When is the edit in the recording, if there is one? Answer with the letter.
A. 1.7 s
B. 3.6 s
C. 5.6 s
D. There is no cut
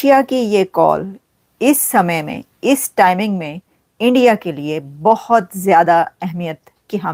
D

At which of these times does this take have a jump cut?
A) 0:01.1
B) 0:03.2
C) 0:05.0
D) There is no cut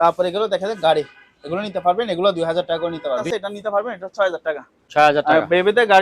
B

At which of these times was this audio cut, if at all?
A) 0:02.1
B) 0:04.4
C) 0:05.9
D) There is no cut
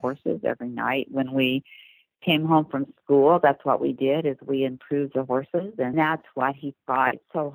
C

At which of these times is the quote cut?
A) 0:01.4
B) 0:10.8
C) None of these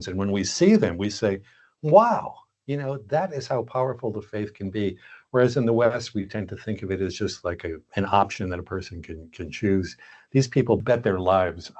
B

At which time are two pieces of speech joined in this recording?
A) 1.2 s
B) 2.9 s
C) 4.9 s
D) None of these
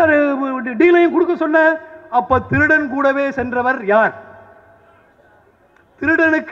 D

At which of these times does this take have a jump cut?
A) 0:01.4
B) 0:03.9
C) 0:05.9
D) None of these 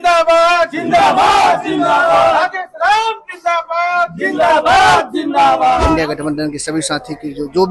C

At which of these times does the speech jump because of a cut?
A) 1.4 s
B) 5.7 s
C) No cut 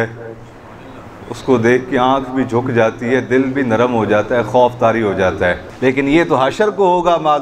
B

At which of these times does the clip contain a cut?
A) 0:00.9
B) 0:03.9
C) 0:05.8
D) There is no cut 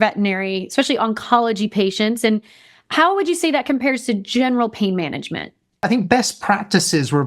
C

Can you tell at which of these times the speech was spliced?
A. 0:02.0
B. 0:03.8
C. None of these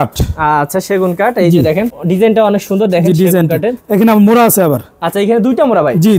A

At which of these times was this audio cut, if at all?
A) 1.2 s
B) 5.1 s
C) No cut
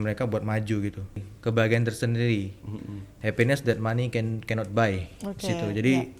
A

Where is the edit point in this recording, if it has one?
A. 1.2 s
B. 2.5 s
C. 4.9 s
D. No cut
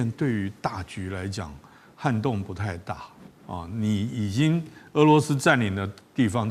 D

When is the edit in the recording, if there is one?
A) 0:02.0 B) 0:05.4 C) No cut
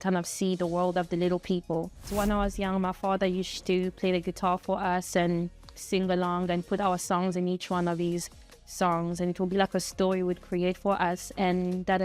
A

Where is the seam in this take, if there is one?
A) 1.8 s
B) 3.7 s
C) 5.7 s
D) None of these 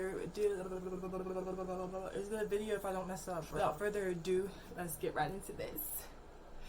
B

